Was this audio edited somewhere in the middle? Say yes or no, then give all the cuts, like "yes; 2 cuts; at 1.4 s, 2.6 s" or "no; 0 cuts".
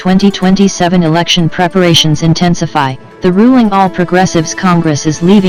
no; 0 cuts